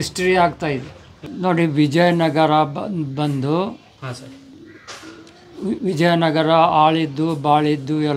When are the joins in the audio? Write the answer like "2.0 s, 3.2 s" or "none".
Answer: 1.2 s

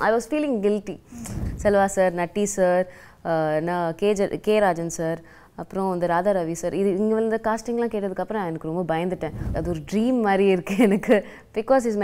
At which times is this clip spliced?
1.0 s, 9.5 s

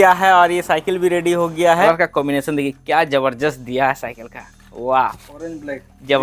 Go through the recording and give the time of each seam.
1.9 s

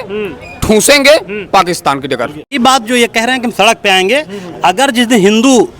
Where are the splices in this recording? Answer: 2.5 s

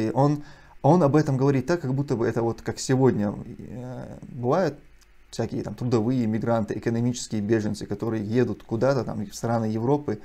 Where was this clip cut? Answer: none

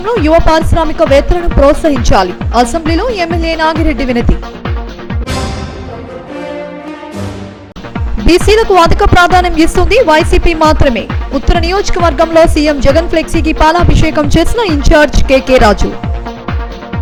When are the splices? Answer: none

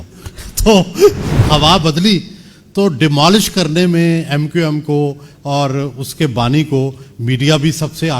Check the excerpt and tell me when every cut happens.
1.3 s

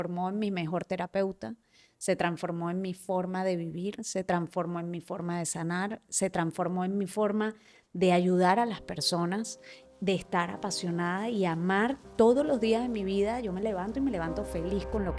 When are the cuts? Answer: none

